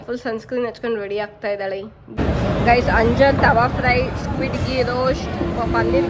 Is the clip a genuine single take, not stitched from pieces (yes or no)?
no